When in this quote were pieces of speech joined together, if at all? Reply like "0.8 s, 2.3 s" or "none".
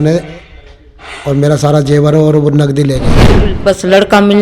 3.5 s